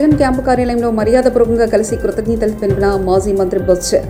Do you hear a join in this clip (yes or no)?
no